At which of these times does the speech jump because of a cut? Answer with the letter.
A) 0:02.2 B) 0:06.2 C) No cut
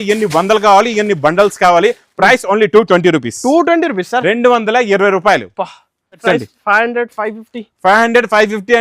B